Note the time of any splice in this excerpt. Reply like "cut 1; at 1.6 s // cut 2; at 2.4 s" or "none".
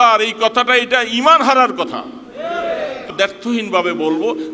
cut 1; at 3.1 s

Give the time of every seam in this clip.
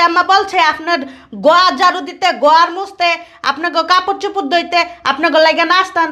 none

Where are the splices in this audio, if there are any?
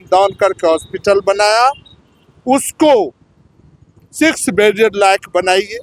none

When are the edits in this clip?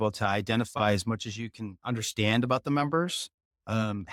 none

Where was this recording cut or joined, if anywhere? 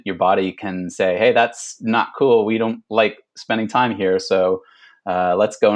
none

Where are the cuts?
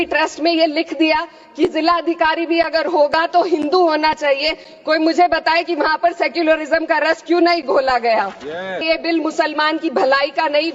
cut 1; at 8.8 s

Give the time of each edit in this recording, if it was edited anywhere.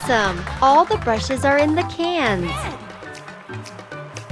cut 1; at 2.5 s

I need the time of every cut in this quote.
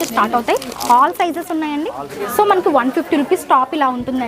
cut 1; at 2.2 s

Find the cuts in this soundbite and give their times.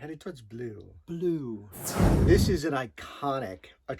cut 1; at 1.9 s

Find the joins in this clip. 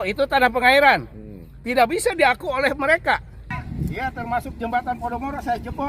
cut 1; at 3.5 s

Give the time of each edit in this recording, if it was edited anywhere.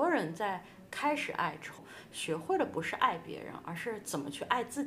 cut 1; at 1.8 s

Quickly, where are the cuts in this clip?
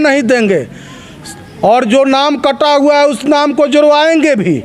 none

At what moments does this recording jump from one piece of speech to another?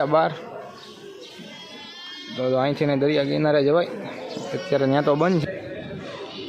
cut 1; at 5.4 s

